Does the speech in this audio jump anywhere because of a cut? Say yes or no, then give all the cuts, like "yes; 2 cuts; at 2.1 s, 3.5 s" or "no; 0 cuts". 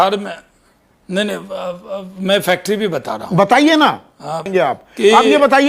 yes; 1 cut; at 4.5 s